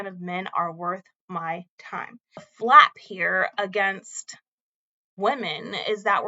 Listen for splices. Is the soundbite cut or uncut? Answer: cut